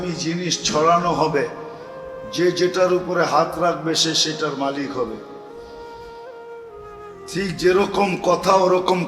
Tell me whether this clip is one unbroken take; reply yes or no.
no